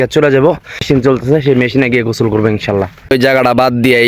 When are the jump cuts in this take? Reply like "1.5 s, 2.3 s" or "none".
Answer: 0.8 s, 3.1 s